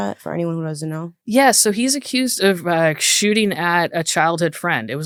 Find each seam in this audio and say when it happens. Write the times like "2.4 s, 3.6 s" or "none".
none